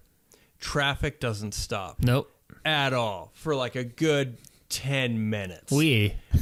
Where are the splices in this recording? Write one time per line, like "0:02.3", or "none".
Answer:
none

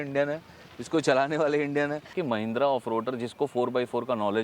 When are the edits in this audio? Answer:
0:02.2

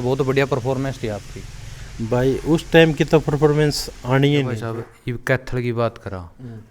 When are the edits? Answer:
0:04.6

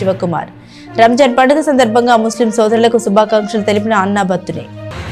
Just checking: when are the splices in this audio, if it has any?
none

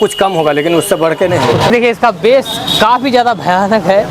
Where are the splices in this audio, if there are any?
0:01.6

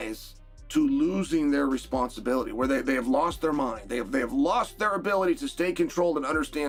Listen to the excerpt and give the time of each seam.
none

